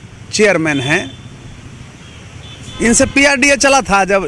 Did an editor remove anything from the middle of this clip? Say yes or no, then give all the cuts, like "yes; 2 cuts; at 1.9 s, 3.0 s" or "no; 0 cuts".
no; 0 cuts